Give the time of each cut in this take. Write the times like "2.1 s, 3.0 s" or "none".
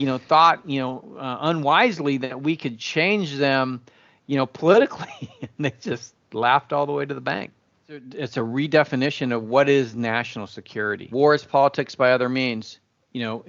8.2 s, 11.1 s